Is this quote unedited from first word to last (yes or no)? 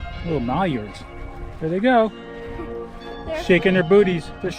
yes